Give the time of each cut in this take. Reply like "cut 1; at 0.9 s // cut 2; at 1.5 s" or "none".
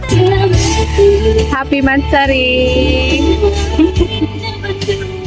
none